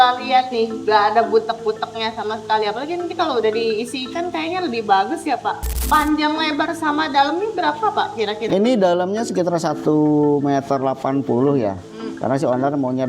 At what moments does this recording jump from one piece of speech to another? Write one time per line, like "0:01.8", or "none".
0:05.7